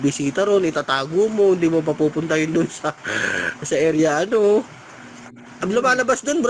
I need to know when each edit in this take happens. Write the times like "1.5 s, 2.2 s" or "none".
none